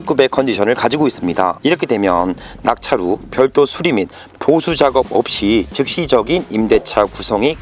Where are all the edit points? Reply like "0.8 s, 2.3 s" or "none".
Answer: none